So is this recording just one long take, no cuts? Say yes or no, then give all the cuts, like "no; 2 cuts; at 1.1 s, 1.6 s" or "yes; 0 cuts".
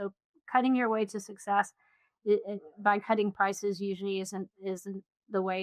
yes; 0 cuts